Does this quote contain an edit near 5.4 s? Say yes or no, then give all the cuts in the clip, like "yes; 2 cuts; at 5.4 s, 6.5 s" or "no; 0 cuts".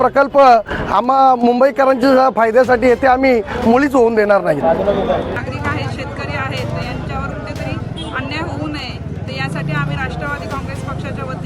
yes; 1 cut; at 5.4 s